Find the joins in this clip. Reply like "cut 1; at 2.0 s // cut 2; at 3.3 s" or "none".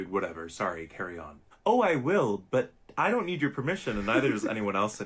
cut 1; at 4.1 s